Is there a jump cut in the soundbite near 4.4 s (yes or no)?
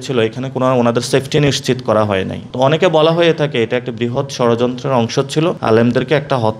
no